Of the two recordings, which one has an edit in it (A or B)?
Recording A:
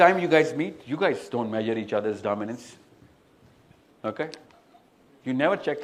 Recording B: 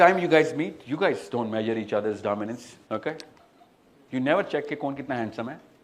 B